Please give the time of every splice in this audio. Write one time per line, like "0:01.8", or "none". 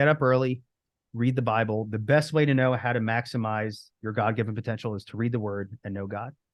none